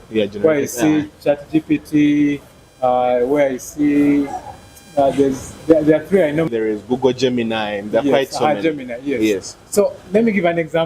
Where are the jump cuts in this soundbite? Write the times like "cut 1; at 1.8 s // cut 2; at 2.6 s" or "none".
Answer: cut 1; at 6.5 s